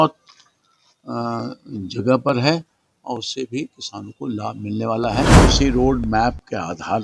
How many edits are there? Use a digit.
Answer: 1